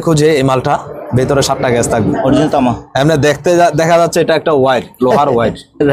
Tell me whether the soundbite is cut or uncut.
uncut